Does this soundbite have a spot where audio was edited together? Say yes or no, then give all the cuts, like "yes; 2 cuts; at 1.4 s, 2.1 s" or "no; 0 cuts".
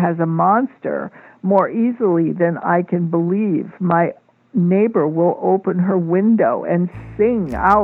no; 0 cuts